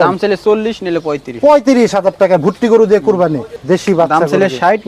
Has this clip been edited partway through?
yes; 1 cut; at 3.5 s

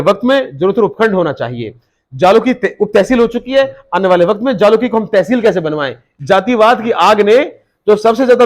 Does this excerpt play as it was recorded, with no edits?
no; 1 cut; at 6.1 s

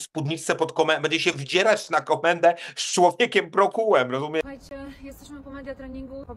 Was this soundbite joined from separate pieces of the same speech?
no; 0 cuts

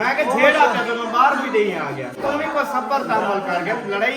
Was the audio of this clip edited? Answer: yes; 1 cut; at 2.2 s

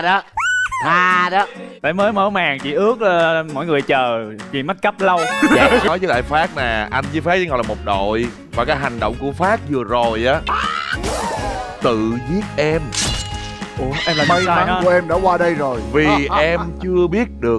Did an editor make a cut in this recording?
yes; 1 cut; at 5.9 s

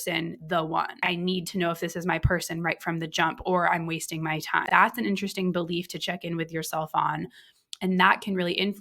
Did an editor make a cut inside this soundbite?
yes; 2 cuts; at 1.0 s, 4.6 s

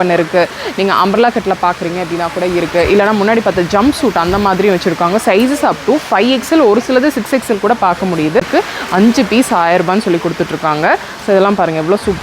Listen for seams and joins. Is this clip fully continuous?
no; 1 cut; at 8.4 s

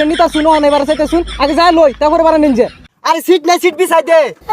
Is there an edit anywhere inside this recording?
yes; 1 cut; at 2.9 s

